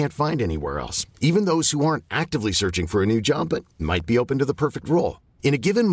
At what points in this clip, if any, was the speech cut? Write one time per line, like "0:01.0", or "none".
none